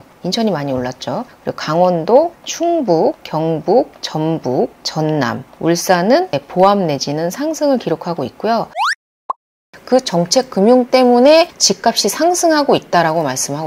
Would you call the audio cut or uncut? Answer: cut